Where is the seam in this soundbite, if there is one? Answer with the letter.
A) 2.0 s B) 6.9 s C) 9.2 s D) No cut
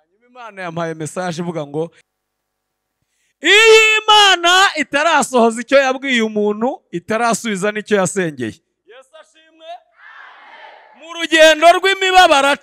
A